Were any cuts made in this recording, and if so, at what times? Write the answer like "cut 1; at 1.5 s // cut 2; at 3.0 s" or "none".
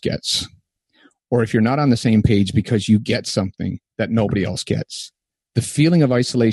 none

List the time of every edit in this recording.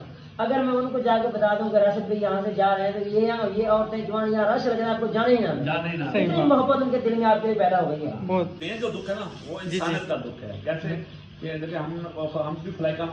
cut 1; at 8.6 s

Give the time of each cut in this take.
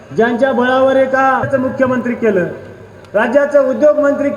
cut 1; at 1.5 s

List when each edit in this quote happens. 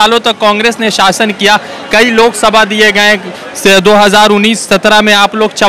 none

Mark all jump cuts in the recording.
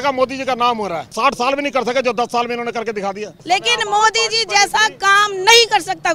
cut 1; at 1.1 s // cut 2; at 3.3 s

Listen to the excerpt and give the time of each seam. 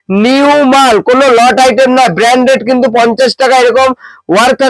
none

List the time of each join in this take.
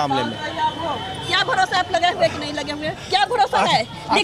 none

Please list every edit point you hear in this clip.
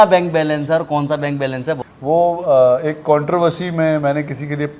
cut 1; at 1.8 s

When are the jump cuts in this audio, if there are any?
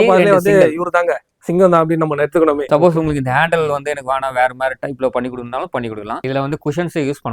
cut 1; at 2.6 s // cut 2; at 6.2 s

